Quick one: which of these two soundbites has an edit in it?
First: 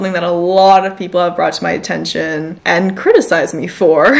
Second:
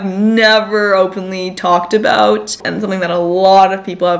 first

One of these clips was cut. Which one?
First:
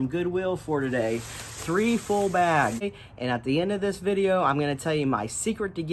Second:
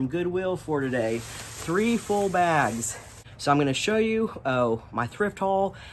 first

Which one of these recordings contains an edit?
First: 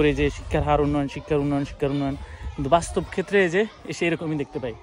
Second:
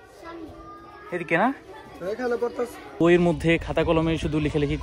second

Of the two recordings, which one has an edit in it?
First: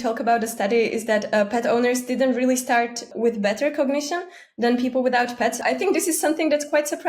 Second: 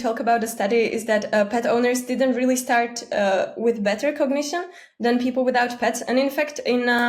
first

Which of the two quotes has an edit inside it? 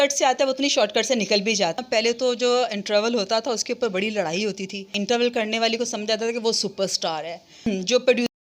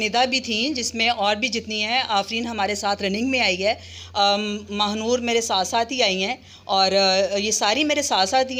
first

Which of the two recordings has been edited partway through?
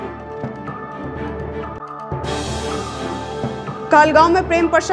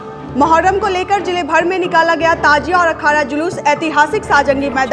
first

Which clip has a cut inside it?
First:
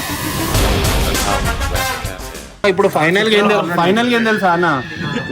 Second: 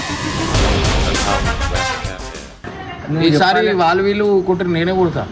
first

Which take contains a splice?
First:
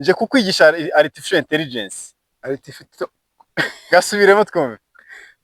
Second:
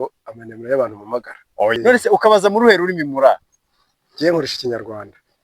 second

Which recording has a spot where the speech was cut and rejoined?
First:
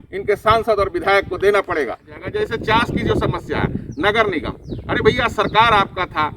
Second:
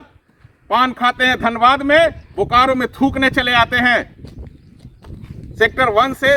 first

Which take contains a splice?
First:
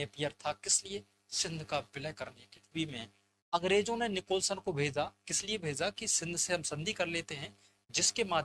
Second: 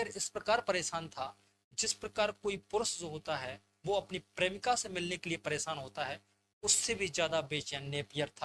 first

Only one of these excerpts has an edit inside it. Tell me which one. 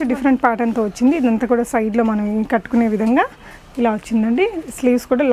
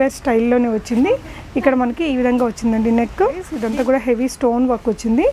second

